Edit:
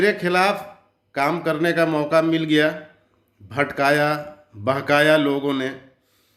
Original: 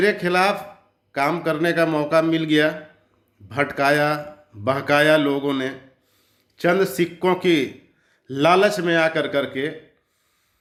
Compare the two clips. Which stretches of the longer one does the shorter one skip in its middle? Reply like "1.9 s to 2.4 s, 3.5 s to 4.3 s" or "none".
none

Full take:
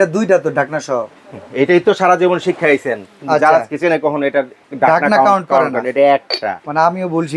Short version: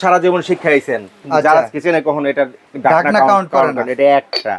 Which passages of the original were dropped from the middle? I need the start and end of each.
none

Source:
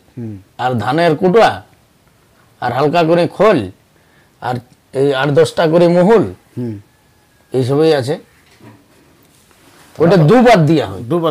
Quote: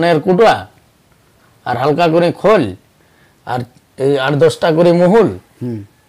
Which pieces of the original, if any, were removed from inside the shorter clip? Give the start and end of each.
none

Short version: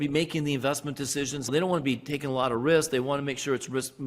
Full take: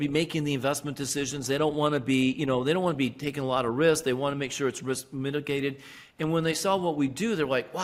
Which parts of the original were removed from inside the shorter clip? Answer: 1.5 s to 2.6 s

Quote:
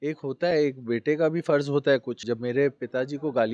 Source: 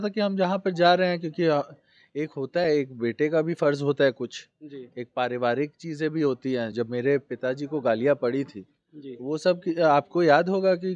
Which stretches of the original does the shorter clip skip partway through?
4.3 s to 6.7 s

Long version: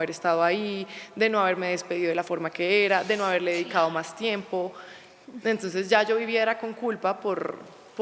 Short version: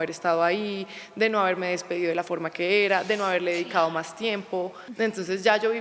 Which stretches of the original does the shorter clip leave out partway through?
4.8 s to 5.3 s

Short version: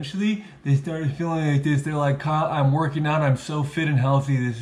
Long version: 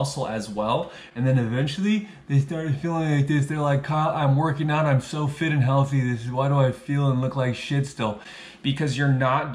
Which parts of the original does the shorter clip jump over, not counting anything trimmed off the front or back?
none

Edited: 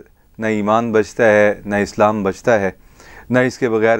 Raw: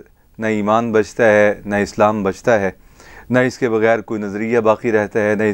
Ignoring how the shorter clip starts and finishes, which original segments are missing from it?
none

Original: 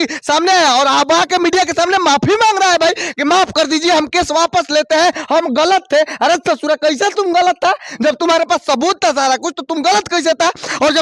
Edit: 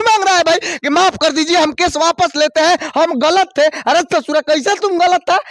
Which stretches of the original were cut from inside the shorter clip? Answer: none

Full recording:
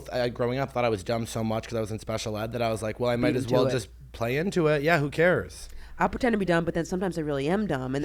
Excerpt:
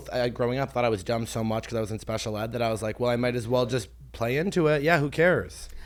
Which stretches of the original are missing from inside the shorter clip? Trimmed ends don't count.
none

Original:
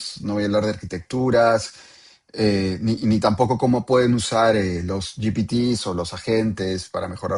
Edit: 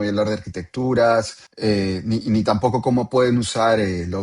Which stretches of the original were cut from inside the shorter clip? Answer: 1.8 s to 2.2 s

